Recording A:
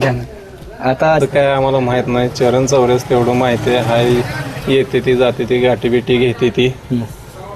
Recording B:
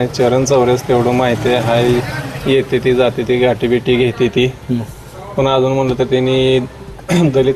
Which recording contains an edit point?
A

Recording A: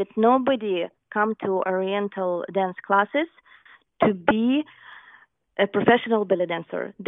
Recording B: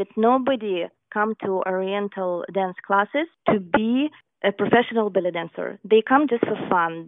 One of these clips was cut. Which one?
B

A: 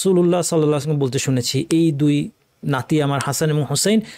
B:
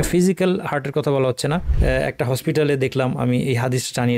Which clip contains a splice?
B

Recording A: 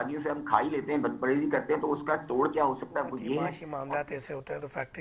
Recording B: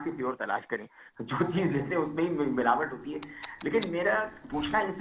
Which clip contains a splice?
A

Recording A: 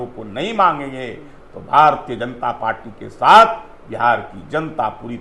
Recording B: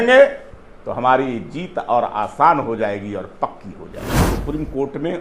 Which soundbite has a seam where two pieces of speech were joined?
B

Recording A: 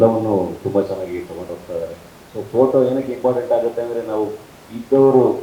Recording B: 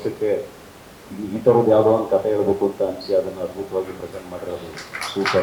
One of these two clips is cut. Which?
A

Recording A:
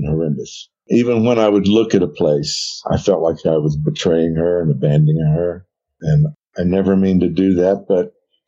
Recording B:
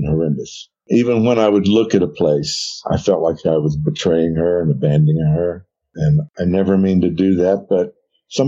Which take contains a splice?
B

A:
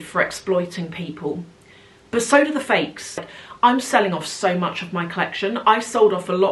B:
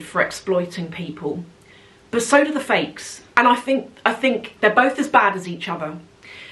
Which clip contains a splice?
A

